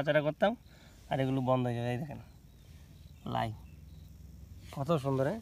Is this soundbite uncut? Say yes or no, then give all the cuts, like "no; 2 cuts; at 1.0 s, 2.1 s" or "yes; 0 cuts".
yes; 0 cuts